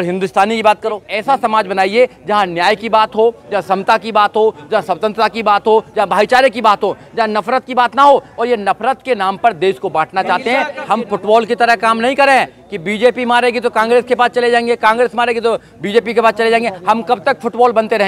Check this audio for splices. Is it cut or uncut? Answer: cut